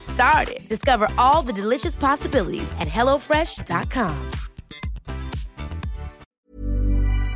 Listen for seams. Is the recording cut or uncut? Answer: cut